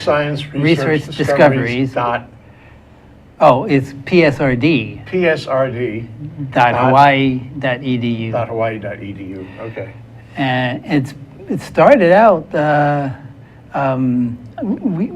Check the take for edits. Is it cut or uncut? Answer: cut